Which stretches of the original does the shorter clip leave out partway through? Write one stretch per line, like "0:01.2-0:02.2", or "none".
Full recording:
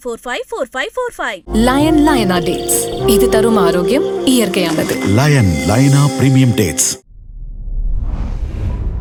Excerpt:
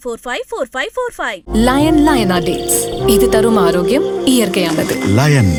none

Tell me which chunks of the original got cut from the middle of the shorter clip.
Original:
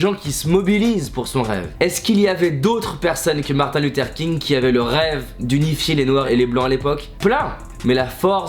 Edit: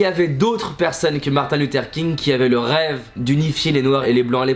none

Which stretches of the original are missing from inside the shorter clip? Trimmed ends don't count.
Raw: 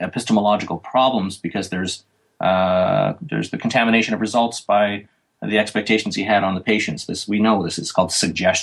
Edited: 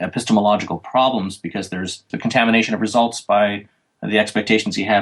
0:02.1-0:03.5

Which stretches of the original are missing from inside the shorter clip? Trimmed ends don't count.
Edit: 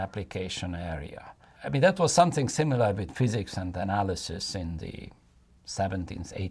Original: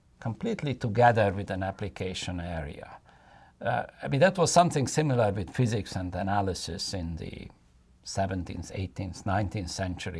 0:03.2-0:03.9

